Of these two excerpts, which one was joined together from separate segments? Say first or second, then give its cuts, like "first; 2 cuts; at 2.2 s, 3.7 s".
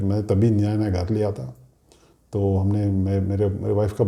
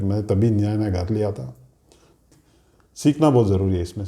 second; 1 cut; at 2.3 s